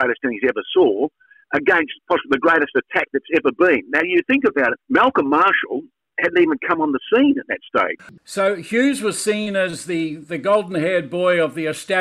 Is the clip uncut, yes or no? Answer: no